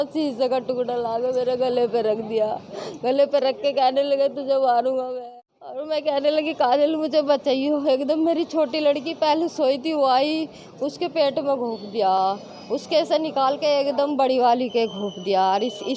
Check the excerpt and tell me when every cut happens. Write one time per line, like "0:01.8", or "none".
0:05.2